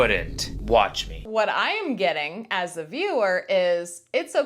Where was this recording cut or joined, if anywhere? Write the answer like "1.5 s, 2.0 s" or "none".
1.2 s

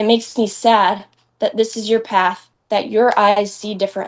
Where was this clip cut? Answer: 2.5 s

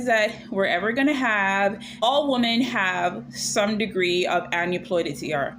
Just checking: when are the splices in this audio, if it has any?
2.0 s

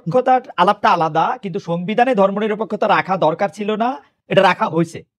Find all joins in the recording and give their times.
none

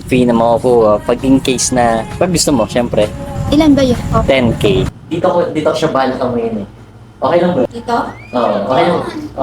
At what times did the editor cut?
4.9 s, 7.7 s

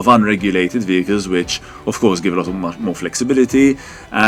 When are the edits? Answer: none

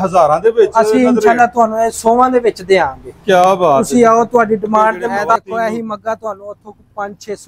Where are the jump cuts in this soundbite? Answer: 5.4 s

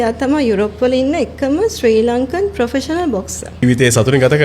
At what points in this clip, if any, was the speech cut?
3.4 s

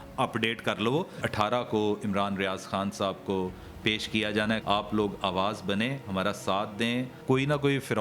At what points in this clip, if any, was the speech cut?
1.2 s, 4.6 s, 7.1 s

